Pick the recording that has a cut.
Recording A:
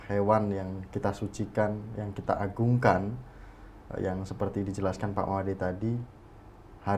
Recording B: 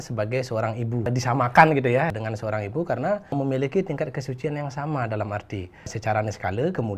B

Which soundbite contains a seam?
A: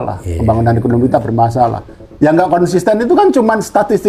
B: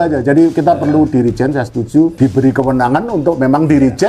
B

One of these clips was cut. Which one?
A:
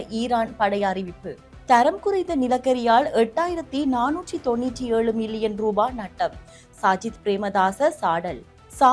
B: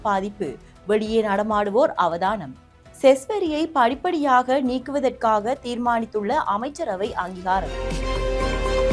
B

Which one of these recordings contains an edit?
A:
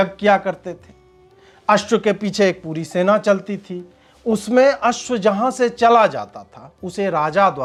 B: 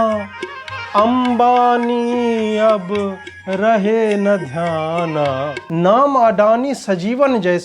B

